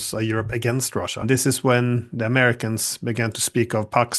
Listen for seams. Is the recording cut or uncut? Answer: cut